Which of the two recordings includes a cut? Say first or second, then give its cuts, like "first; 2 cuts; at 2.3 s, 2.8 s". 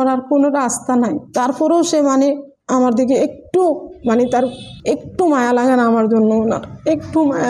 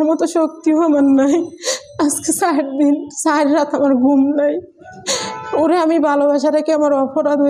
first; 1 cut; at 4.7 s